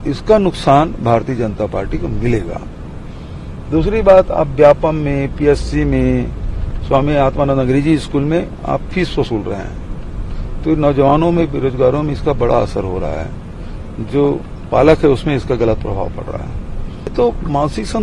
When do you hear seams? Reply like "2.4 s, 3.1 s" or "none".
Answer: 17.1 s